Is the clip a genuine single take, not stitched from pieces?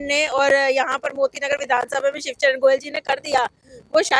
yes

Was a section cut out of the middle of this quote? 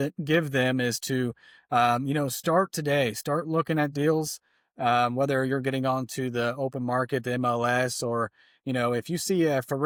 no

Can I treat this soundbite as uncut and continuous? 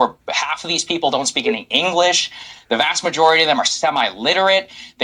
yes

